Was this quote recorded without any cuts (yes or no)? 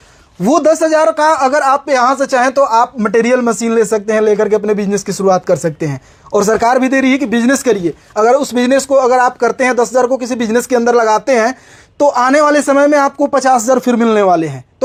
yes